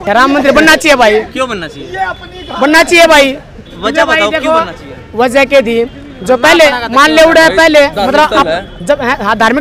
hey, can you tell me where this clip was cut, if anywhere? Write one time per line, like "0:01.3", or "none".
none